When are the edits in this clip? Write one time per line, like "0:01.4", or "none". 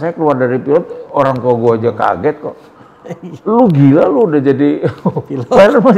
none